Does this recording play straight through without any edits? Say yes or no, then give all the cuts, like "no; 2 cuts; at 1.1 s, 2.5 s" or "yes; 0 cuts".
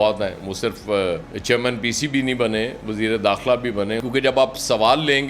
no; 1 cut; at 4.0 s